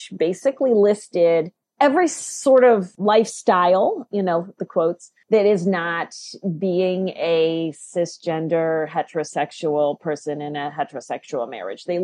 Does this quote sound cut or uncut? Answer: cut